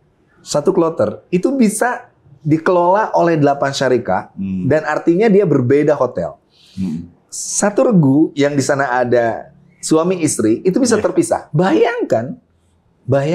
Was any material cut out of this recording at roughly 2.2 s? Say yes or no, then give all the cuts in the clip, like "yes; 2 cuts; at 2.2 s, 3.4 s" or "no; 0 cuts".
no; 1 cut; at 11.5 s